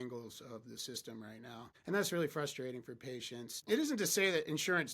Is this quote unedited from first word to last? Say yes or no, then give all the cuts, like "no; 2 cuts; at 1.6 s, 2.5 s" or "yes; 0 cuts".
no; 2 cuts; at 1.7 s, 3.6 s